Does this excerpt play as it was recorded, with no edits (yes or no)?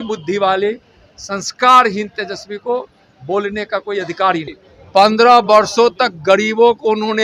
no